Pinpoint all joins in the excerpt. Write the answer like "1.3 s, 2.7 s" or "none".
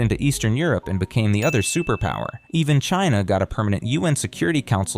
2.4 s